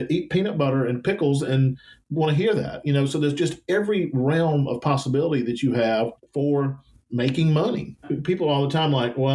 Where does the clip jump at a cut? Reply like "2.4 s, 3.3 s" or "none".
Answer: 8.1 s